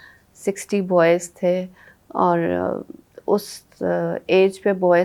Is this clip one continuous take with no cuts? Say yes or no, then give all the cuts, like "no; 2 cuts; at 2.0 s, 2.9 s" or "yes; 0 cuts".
yes; 0 cuts